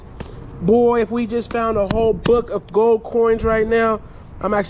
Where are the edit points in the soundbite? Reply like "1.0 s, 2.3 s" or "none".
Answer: none